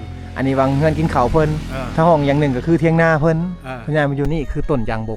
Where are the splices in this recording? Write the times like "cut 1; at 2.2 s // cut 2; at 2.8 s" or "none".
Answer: cut 1; at 4.3 s